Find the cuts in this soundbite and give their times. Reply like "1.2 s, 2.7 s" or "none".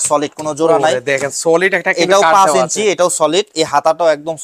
none